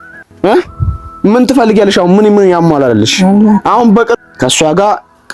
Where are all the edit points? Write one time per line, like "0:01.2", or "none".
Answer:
0:04.2